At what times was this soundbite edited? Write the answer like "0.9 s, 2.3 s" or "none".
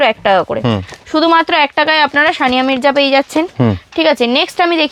none